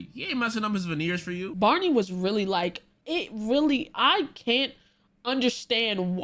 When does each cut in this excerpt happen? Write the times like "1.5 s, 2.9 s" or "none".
1.5 s

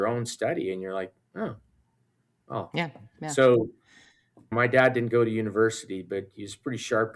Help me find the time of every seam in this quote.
none

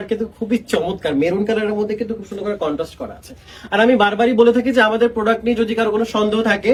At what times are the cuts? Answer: none

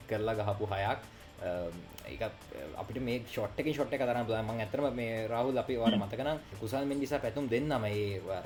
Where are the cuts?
none

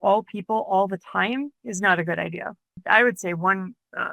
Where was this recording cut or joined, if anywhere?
2.8 s

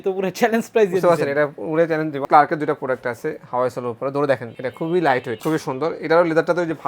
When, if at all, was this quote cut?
2.2 s, 4.6 s, 5.4 s

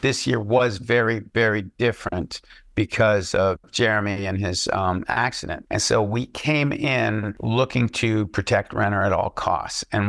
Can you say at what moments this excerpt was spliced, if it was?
5.5 s, 7.3 s

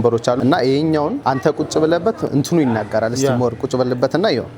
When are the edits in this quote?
2.3 s

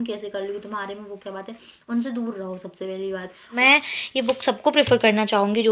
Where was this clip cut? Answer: 3.6 s

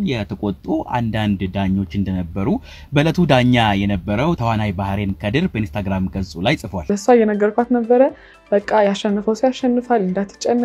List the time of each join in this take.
6.8 s

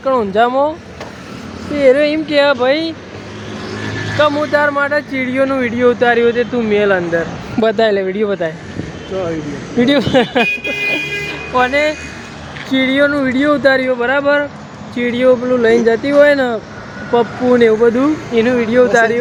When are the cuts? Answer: none

